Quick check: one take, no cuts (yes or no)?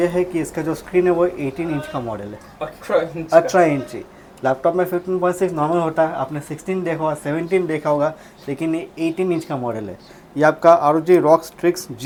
yes